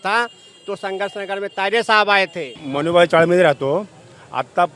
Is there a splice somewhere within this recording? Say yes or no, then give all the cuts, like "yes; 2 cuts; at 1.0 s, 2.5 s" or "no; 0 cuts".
no; 0 cuts